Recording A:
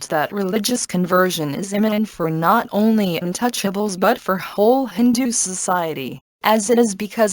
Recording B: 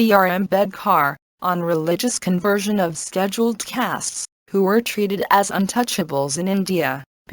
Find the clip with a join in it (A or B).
B